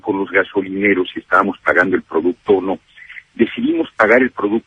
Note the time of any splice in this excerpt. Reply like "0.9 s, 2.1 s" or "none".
none